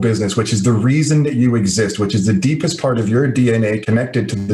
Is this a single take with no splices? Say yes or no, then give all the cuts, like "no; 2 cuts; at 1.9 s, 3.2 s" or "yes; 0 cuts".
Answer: yes; 0 cuts